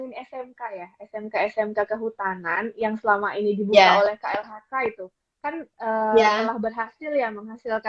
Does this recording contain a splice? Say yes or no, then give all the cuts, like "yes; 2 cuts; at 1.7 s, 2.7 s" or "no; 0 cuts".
no; 0 cuts